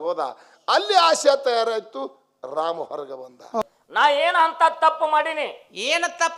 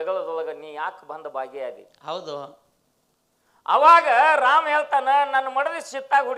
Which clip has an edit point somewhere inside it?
first; 1 cut; at 3.6 s

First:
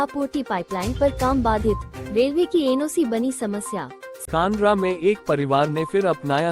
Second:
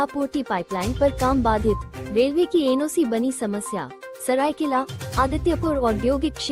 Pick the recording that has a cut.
first; 1 cut; at 4.2 s

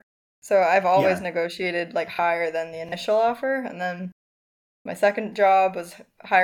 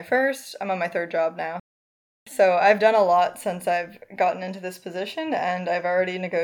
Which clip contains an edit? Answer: second; 1 cut; at 1.6 s

